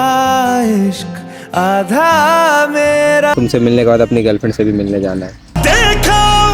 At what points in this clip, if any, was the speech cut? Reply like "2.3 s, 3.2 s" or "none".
3.3 s